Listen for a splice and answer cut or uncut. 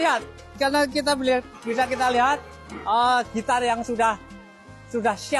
uncut